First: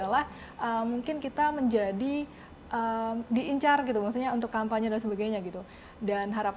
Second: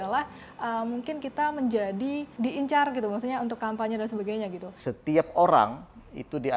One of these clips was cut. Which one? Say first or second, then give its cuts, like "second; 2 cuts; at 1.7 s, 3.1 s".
second; 2 cuts; at 2.3 s, 4.8 s